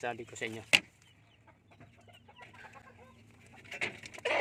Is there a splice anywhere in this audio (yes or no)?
no